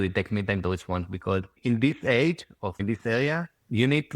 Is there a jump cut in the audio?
yes; 2 cuts; at 1.6 s, 2.8 s

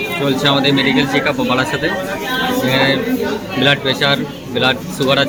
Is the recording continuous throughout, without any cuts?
yes; 0 cuts

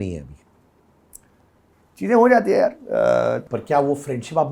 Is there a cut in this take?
yes; 1 cut; at 3.5 s

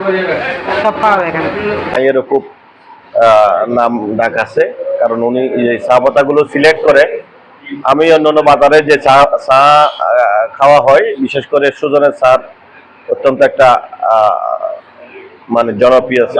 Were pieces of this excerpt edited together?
yes; 1 cut; at 2.0 s

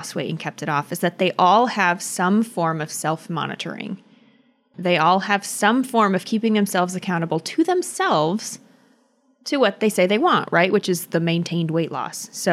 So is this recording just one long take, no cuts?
yes; 0 cuts

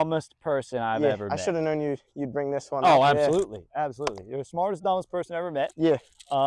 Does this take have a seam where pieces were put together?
no; 0 cuts

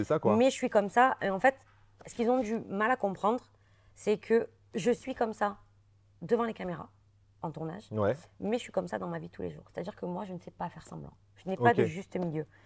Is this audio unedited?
yes; 0 cuts

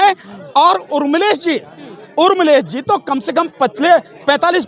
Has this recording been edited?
no; 0 cuts

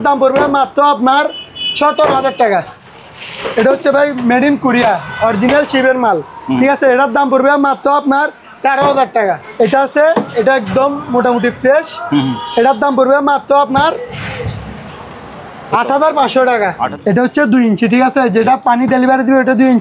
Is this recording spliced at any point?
yes; 3 cuts; at 2.8 s, 9.5 s, 16.9 s

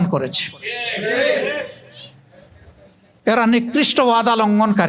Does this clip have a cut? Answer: no; 0 cuts

